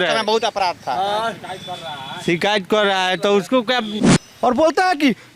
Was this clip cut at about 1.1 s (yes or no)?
no